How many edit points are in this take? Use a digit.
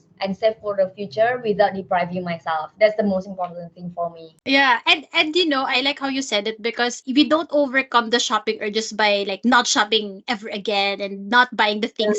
0